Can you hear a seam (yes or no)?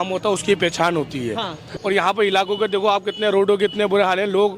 yes